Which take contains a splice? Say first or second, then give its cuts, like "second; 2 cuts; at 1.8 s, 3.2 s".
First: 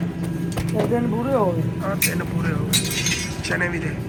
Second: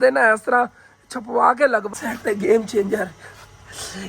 second; 1 cut; at 1.9 s